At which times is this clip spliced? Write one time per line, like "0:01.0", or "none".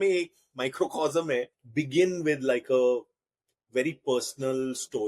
0:01.6

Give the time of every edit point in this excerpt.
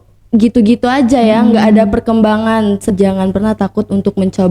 0:02.8

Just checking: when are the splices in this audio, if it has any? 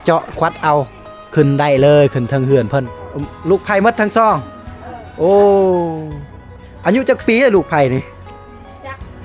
0:02.9

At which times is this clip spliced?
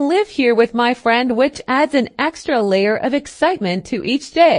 0:01.3

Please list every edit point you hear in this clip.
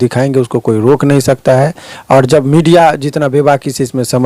none

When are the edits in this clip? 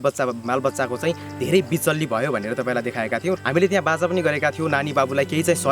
0:03.4

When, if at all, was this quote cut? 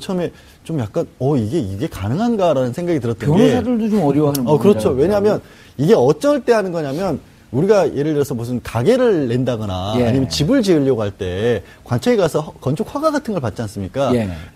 0:13.5

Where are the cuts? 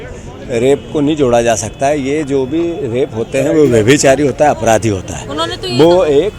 none

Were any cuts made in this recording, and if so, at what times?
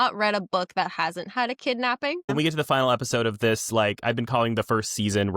0:02.3

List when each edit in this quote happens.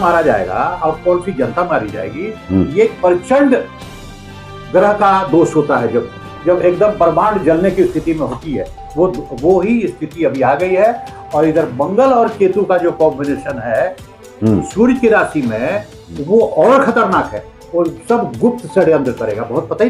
none

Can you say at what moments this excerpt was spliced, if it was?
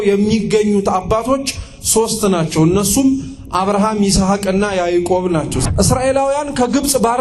0:05.6

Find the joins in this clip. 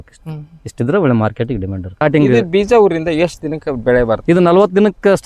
0:01.9

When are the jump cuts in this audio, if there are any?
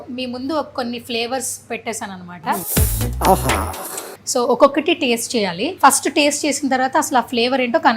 0:02.7
0:04.1
0:05.7

